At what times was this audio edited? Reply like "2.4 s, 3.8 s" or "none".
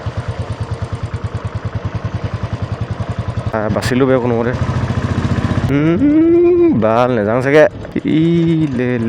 3.5 s, 5.7 s, 8.0 s